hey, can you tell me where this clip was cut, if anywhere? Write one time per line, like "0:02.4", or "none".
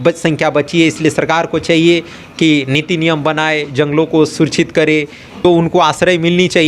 0:05.4